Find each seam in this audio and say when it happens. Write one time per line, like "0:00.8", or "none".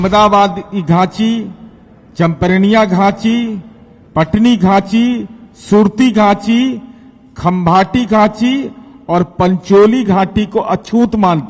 none